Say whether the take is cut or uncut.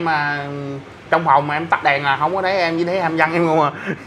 uncut